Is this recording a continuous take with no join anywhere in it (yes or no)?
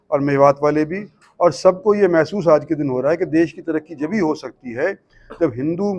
yes